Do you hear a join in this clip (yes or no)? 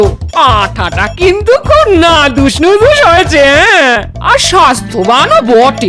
no